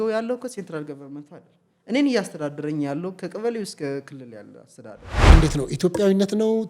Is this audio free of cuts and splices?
no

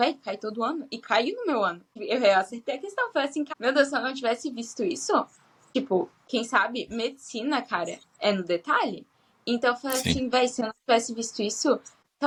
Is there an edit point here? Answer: no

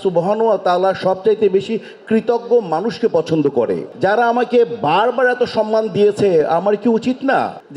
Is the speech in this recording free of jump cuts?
yes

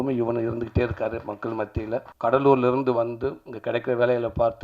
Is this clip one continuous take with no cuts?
no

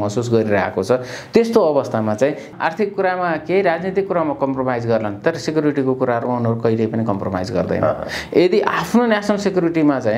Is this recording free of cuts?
no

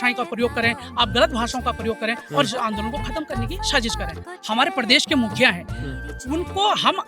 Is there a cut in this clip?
yes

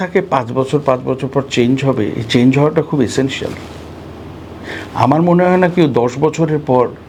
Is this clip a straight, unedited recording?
yes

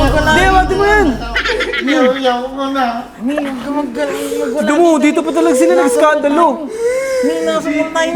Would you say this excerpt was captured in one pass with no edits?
yes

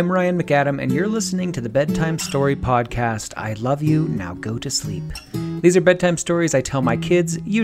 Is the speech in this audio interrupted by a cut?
no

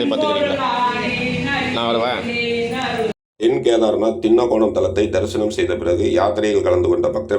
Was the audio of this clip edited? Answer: no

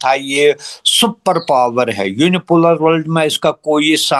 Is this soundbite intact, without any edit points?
yes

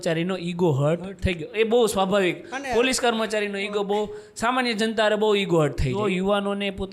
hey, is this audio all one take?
no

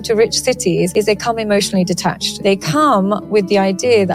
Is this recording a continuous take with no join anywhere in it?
no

